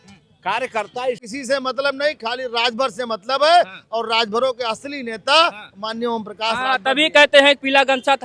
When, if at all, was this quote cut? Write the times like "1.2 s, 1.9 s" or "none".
1.3 s